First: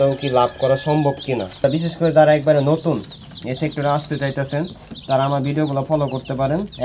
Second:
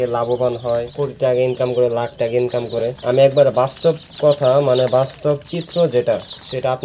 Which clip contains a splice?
first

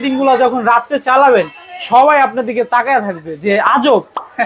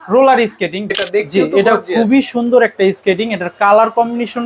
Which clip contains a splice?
second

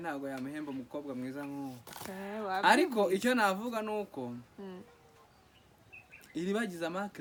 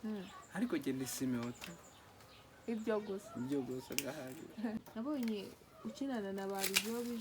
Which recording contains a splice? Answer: second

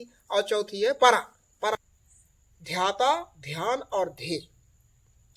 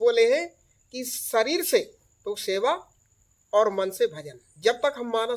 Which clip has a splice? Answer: first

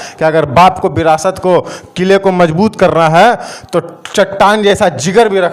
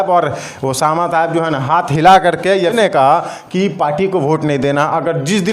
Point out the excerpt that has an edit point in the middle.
second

